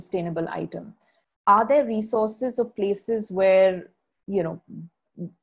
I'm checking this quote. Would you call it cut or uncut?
uncut